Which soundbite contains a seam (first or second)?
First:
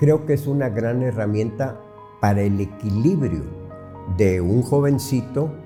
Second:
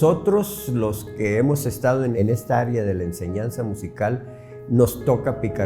second